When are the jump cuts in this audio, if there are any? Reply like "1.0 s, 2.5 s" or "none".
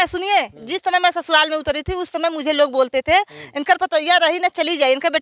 none